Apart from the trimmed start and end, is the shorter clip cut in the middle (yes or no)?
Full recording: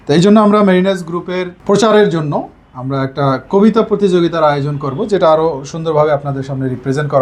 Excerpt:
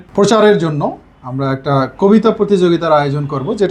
no